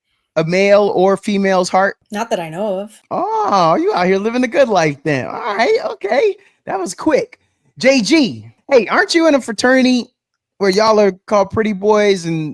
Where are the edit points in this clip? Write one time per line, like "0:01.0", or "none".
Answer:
0:02.0
0:03.0
0:08.5